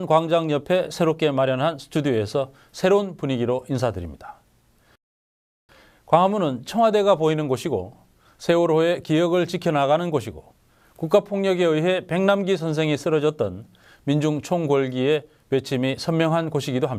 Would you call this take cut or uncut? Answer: uncut